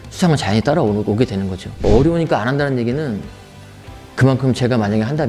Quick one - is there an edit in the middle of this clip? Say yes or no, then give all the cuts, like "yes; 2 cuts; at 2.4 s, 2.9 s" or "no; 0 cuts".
yes; 1 cut; at 1.8 s